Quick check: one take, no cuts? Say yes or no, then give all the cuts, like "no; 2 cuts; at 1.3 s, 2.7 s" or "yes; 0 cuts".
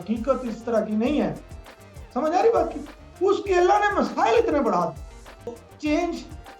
no; 1 cut; at 5.6 s